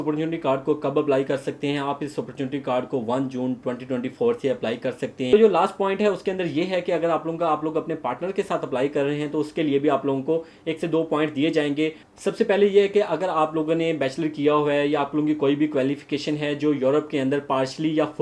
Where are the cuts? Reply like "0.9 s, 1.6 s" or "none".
5.3 s, 12.0 s